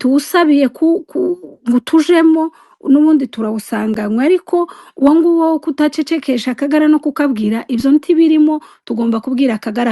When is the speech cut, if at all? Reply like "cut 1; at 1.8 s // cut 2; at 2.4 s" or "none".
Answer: none